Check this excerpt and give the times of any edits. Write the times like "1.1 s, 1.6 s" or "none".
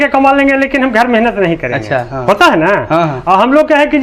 none